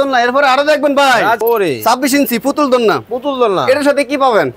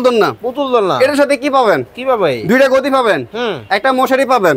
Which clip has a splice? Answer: first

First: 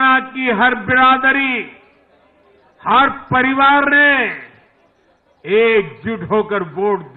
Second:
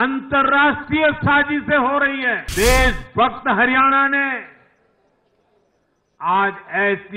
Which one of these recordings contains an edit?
second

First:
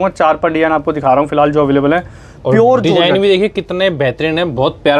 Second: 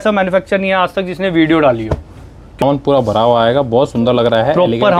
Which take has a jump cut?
second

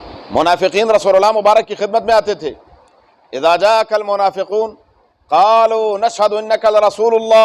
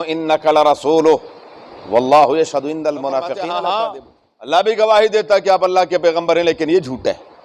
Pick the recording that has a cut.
second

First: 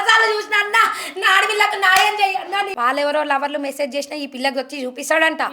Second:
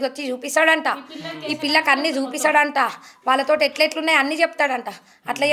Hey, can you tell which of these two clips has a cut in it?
first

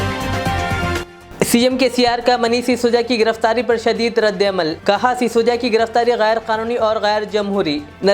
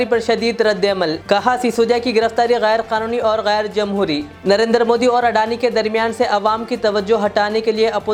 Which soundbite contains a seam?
first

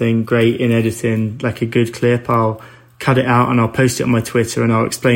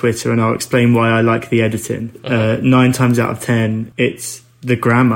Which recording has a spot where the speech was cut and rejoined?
second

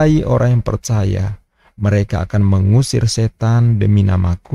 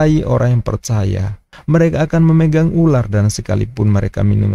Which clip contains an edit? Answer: second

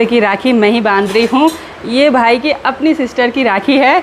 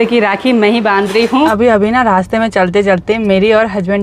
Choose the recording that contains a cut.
second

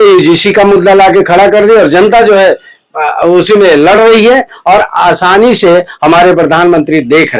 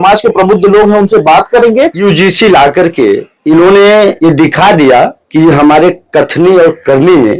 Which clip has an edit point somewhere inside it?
second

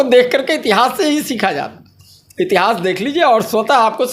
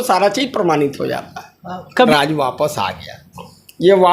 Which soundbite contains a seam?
second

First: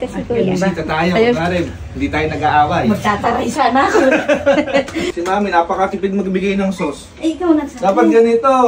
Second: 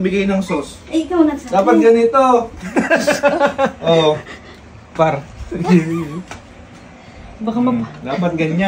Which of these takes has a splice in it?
first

